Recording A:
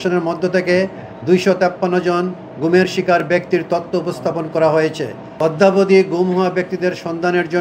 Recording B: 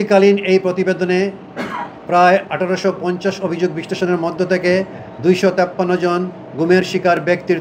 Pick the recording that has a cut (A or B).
A